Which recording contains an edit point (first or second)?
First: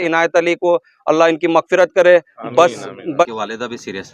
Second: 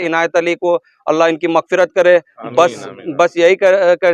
first